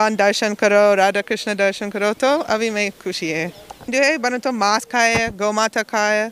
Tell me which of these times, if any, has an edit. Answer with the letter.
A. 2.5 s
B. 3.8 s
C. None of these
B